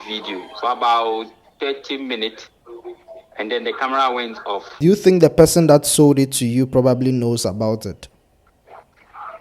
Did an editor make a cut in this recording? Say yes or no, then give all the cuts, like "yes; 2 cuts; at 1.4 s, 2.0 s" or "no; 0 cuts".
yes; 1 cut; at 4.7 s